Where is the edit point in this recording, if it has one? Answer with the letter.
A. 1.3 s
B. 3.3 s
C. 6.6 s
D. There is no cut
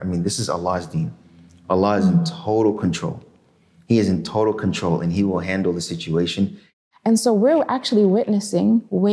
C